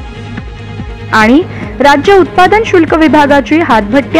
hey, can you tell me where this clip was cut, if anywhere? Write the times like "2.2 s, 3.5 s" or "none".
1.1 s